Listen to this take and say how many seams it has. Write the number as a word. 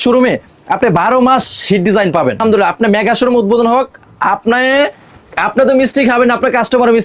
zero